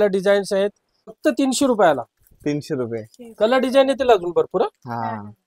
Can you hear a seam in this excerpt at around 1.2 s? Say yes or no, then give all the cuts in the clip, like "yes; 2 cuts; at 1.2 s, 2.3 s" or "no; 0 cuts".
yes; 1 cut; at 1.2 s